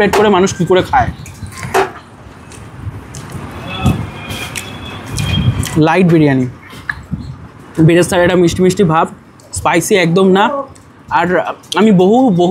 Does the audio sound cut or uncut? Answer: uncut